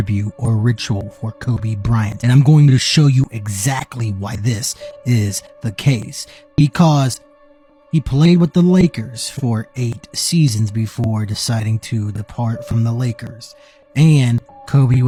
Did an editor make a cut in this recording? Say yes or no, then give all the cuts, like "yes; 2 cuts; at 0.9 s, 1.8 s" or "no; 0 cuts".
no; 0 cuts